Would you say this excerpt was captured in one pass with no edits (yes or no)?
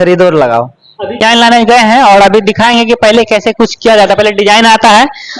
no